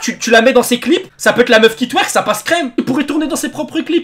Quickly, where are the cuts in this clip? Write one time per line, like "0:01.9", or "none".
0:01.1